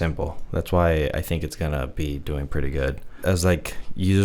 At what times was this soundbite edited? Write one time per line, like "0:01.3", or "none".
0:03.1